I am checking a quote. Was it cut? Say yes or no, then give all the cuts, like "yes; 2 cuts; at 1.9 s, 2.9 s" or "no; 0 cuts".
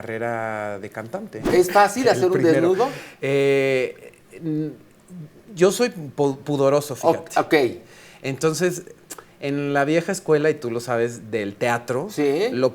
yes; 1 cut; at 1.4 s